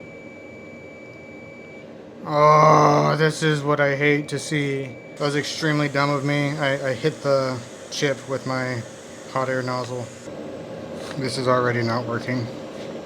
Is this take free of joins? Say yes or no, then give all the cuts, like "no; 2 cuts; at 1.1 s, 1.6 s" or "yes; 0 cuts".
no; 2 cuts; at 5.0 s, 10.3 s